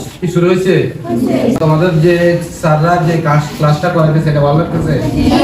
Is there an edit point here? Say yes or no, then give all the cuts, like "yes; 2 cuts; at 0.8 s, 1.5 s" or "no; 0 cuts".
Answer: yes; 1 cut; at 1.6 s